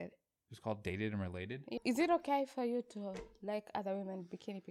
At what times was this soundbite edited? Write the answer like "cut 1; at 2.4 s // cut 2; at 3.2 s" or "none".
cut 1; at 1.6 s